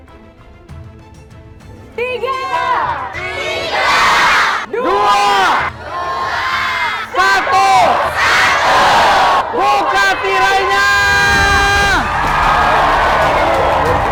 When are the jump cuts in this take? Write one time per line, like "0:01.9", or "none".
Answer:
none